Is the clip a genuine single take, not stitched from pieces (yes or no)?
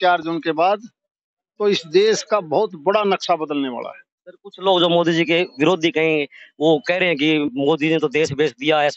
yes